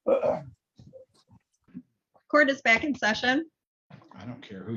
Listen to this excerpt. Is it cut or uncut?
cut